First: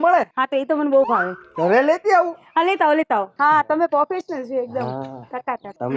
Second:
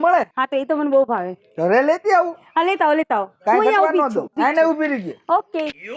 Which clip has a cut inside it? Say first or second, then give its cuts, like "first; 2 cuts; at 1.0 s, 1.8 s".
first; 1 cut; at 3.3 s